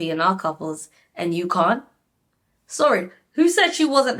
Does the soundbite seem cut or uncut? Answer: uncut